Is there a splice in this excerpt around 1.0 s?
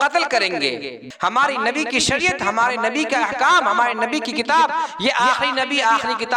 yes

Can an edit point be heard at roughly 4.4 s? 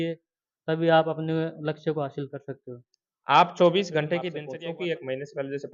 yes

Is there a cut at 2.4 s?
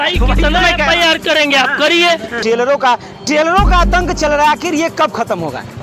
yes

